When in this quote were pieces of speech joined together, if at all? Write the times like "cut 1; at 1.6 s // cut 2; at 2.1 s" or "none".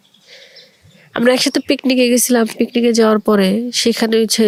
none